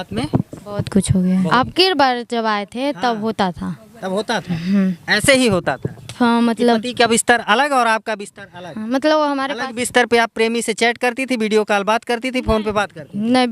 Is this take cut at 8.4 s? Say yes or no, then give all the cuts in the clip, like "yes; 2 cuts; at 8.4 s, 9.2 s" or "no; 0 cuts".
no; 1 cut; at 1.5 s